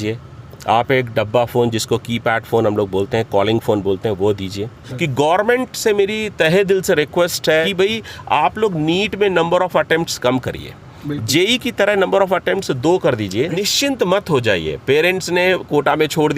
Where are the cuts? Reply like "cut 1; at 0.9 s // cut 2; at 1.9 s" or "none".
cut 1; at 4.8 s // cut 2; at 7.7 s // cut 3; at 13.5 s